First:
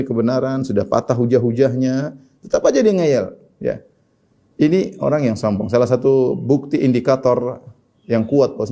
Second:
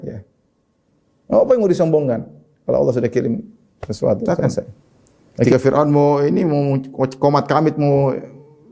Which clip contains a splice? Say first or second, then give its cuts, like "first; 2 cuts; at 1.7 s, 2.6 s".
second; 1 cut; at 5.5 s